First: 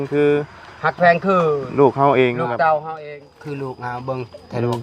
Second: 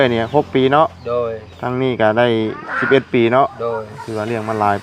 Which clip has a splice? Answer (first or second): first